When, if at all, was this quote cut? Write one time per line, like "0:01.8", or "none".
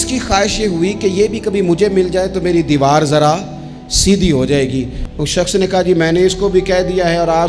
0:05.0

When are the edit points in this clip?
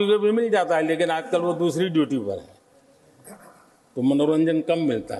none

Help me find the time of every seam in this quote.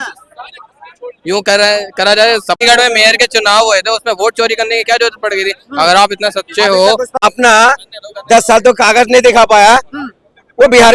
0:02.6
0:07.2

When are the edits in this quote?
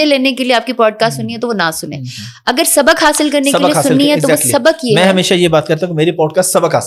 none

